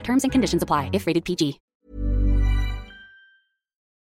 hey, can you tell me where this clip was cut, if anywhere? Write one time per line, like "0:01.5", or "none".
0:01.7